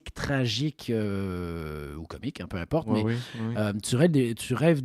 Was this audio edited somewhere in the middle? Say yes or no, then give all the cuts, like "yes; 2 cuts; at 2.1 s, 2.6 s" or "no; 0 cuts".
no; 0 cuts